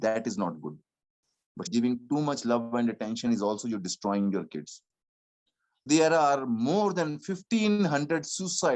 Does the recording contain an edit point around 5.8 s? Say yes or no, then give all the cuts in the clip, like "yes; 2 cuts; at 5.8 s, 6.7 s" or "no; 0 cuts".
yes; 2 cuts; at 1.7 s, 5.8 s